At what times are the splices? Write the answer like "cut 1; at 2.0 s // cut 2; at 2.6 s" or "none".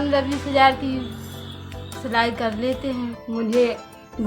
cut 1; at 3.2 s